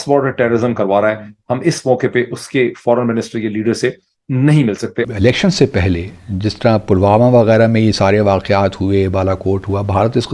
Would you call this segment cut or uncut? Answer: cut